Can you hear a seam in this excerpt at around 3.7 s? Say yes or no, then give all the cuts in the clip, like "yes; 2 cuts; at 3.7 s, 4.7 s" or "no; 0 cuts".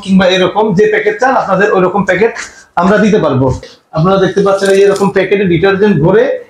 yes; 1 cut; at 3.7 s